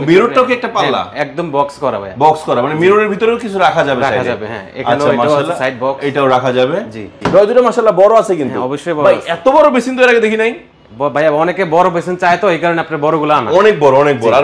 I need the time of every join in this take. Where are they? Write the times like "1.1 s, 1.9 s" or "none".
7.1 s